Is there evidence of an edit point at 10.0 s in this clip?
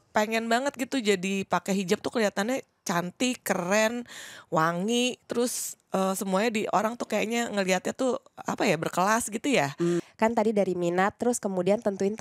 yes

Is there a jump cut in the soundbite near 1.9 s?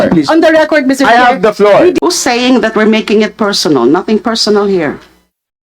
yes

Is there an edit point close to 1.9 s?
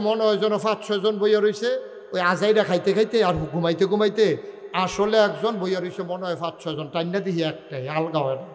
no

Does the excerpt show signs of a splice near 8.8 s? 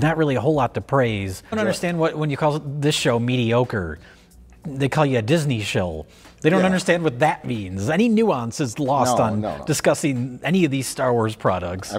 no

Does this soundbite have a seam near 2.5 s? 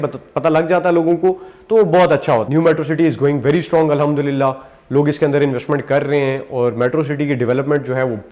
yes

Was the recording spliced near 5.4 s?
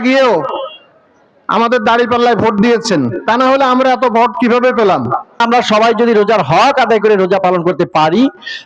yes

